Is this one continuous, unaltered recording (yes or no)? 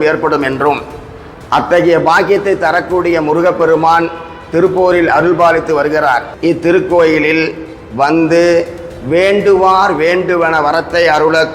no